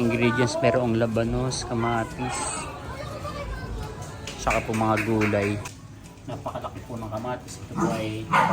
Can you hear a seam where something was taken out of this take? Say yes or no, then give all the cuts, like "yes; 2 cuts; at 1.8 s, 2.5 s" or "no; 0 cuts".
yes; 1 cut; at 5.7 s